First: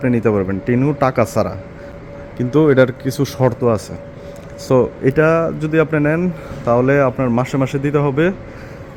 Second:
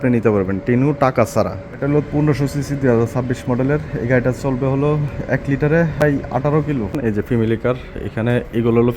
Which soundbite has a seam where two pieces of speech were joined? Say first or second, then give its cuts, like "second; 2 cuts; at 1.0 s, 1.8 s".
second; 3 cuts; at 1.8 s, 6.0 s, 6.9 s